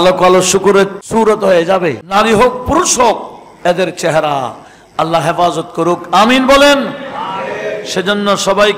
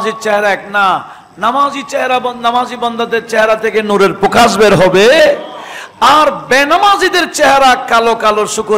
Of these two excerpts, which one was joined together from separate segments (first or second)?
first